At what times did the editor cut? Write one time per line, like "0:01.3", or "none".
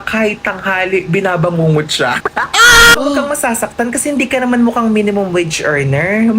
0:03.0